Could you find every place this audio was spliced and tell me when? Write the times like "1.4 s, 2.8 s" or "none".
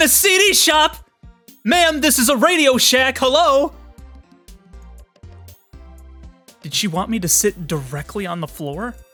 none